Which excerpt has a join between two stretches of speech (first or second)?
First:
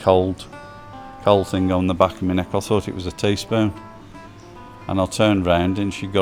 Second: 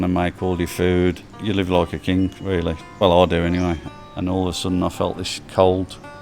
second